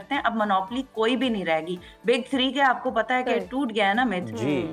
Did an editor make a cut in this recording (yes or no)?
no